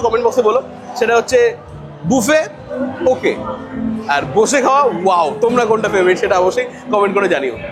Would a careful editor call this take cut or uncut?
uncut